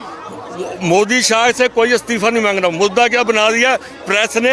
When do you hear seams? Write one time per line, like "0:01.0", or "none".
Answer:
none